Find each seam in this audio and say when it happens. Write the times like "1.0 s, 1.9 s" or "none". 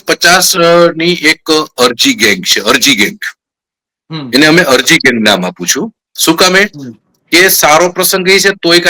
none